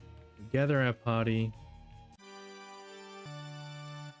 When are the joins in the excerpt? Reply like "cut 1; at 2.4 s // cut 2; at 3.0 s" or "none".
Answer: cut 1; at 3.3 s